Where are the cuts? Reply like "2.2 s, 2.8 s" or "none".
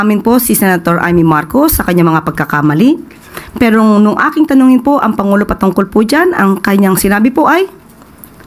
none